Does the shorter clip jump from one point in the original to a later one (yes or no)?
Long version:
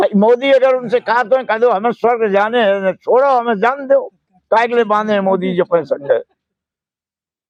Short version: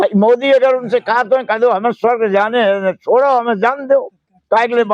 no